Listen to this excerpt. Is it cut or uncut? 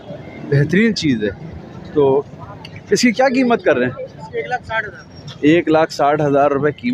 uncut